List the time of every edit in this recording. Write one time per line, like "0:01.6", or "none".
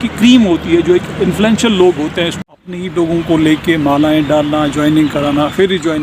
0:02.5